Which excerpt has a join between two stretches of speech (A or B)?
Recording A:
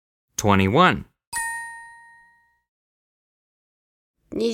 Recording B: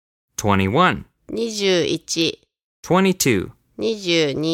B